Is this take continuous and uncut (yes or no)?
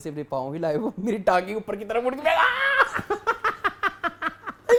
yes